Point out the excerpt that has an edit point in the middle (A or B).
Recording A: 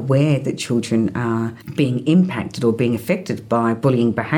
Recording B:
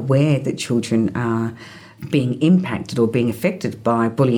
A